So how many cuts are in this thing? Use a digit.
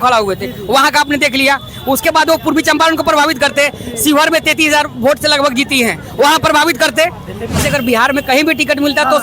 1